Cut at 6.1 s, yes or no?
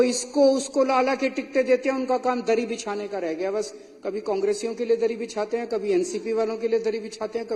no